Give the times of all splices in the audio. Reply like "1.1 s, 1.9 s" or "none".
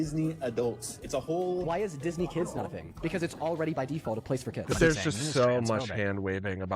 4.7 s